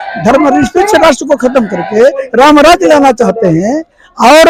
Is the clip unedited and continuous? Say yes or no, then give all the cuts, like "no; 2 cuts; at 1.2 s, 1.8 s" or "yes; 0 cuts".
yes; 0 cuts